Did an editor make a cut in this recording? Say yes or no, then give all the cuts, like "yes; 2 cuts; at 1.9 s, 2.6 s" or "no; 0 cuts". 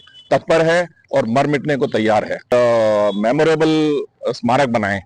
yes; 1 cut; at 2.4 s